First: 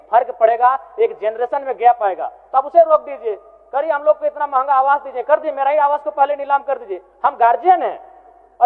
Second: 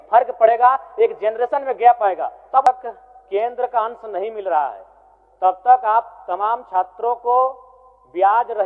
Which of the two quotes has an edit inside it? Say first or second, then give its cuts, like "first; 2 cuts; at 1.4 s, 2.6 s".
second; 1 cut; at 2.7 s